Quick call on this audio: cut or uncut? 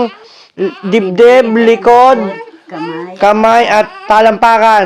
uncut